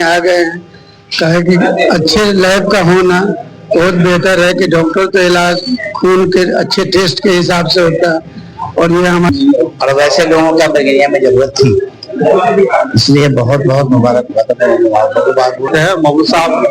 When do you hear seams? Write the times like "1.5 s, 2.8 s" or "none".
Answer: 9.3 s, 15.7 s